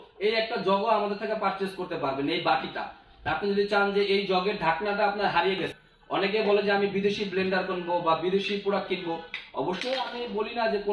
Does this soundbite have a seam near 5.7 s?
yes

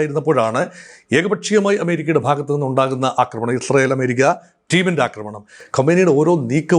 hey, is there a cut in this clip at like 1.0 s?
no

